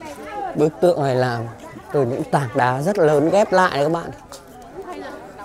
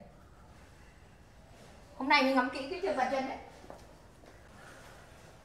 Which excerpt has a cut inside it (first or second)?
second